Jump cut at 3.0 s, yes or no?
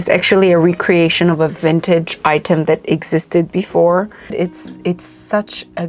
no